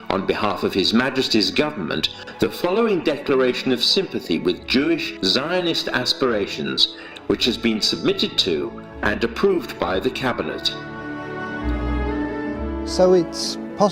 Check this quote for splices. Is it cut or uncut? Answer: uncut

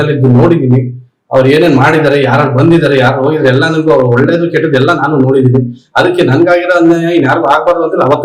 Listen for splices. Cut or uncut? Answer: uncut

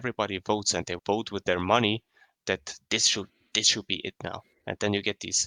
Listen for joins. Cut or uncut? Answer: uncut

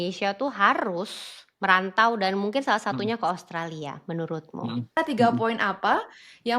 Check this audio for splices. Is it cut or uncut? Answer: cut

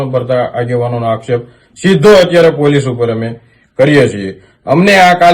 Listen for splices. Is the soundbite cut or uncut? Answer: uncut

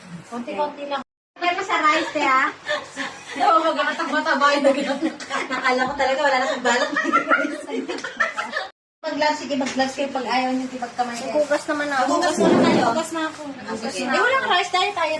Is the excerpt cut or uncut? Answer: cut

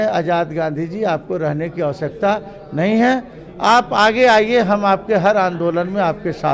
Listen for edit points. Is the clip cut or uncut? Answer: uncut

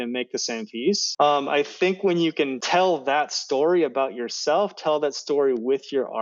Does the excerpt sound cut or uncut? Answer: cut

